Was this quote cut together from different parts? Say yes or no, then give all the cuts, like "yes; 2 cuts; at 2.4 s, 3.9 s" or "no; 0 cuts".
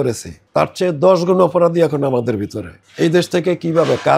yes; 1 cut; at 2.8 s